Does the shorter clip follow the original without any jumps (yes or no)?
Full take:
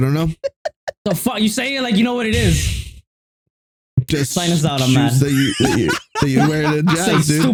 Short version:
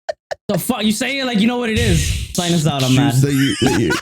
no